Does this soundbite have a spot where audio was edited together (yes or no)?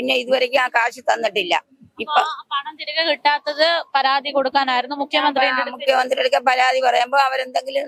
no